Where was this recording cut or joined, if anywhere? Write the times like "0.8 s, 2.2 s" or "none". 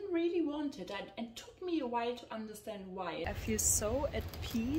3.3 s